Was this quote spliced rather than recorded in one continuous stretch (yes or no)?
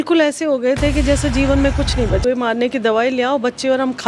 yes